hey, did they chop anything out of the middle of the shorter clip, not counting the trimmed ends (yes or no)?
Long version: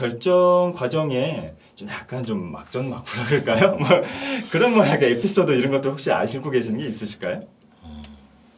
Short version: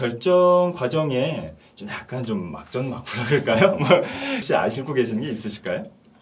yes